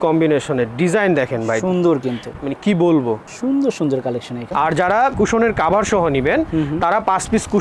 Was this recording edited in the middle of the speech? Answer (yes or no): yes